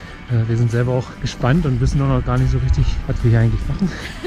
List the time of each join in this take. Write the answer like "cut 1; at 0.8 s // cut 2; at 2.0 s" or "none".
cut 1; at 1.2 s // cut 2; at 3.0 s